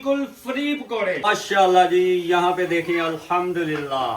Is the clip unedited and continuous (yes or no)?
no